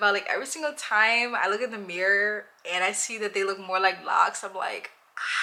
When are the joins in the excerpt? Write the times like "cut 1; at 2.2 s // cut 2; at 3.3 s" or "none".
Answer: none

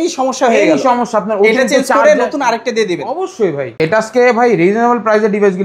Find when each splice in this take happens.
cut 1; at 3.7 s

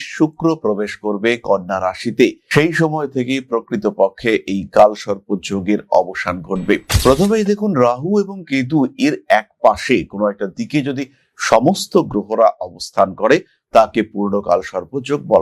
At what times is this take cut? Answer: cut 1; at 6.9 s

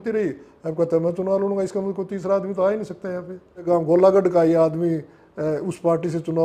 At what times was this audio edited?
cut 1; at 3.6 s

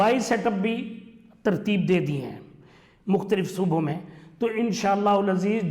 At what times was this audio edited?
none

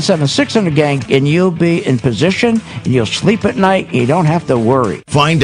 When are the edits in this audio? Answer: cut 1; at 1.0 s

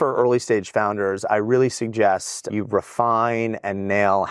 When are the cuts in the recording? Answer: cut 1; at 2.5 s

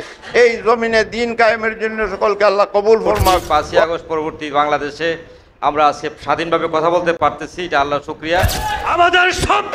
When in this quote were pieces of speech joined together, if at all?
cut 1; at 3.6 s // cut 2; at 7.2 s // cut 3; at 8.8 s

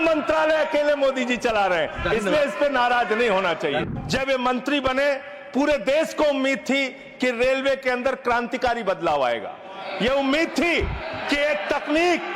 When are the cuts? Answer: cut 1; at 3.8 s

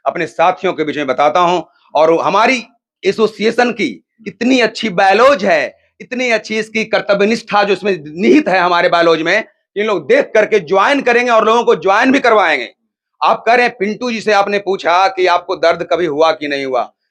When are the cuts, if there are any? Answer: none

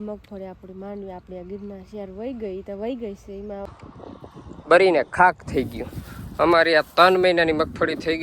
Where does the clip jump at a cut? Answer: cut 1; at 3.7 s

